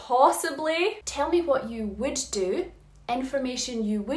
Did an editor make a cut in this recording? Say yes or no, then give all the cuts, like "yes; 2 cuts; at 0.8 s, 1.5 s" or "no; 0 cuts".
yes; 1 cut; at 1.0 s